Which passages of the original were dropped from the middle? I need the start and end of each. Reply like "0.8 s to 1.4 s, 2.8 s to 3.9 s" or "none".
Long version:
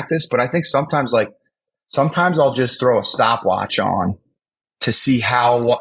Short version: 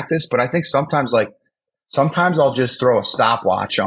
none